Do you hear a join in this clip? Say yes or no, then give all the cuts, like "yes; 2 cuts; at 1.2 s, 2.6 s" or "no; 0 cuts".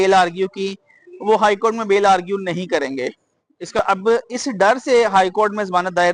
yes; 1 cut; at 3.8 s